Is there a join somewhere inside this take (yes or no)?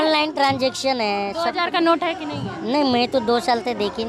no